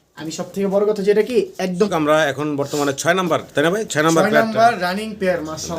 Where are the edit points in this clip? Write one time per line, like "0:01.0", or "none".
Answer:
0:01.9